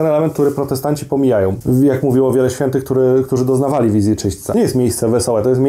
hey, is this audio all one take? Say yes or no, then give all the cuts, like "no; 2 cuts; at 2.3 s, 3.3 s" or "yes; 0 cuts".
no; 2 cuts; at 1.6 s, 4.5 s